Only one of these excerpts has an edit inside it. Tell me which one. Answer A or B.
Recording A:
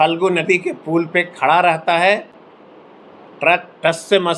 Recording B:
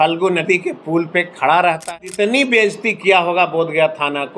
B